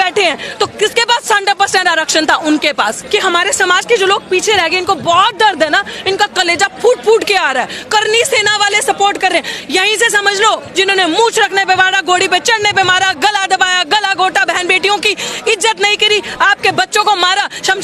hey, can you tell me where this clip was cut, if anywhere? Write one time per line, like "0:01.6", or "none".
0:03.0
0:10.7